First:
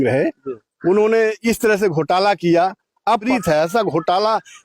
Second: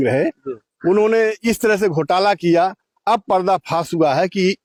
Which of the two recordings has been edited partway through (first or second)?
first